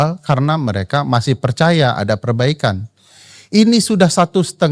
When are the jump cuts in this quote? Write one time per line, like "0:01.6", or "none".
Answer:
none